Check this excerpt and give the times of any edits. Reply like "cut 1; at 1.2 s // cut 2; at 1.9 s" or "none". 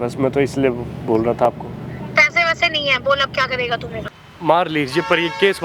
cut 1; at 4.2 s